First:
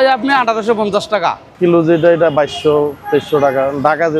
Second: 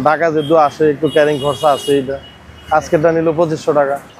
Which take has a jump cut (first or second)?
first